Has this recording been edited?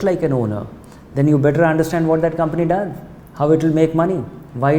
no; 0 cuts

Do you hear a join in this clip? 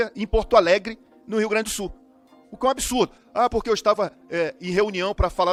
no; 0 cuts

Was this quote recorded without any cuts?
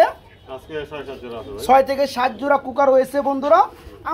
yes; 0 cuts

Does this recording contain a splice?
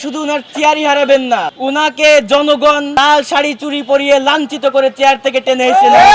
yes; 2 cuts; at 1.5 s, 2.9 s

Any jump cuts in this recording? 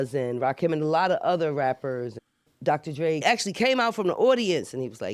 yes; 2 cuts; at 2.2 s, 3.2 s

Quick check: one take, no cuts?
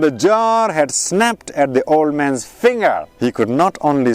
no; 1 cut; at 3.1 s

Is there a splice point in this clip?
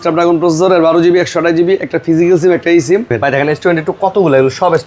yes; 1 cut; at 3.2 s

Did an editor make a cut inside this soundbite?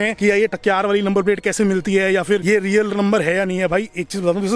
no; 0 cuts

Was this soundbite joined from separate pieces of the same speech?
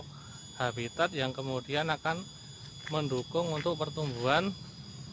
no; 0 cuts

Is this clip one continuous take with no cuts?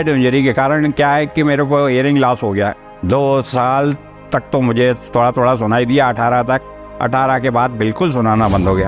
yes; 0 cuts

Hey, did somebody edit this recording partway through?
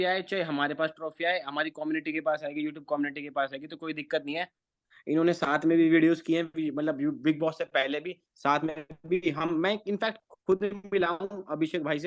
yes; 1 cut; at 4.6 s

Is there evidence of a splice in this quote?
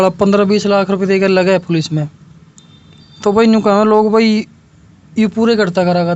no; 0 cuts

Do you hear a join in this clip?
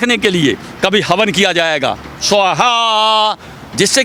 no; 0 cuts

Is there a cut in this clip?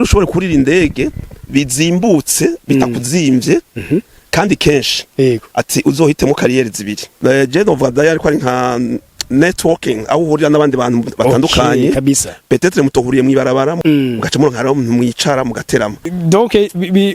yes; 3 cuts; at 7.1 s, 13.8 s, 16.1 s

